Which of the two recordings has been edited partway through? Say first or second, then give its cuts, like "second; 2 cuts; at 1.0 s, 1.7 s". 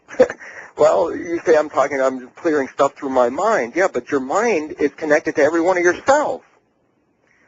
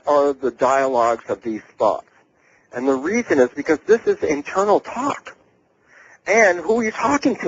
second; 1 cut; at 3.9 s